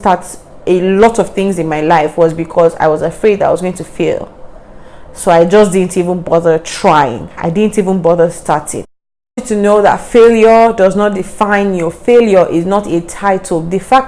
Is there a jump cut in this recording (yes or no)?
yes